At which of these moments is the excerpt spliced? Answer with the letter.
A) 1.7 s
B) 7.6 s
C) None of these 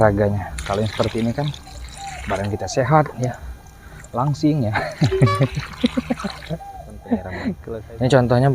B